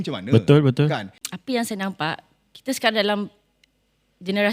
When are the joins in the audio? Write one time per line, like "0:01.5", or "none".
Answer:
0:01.1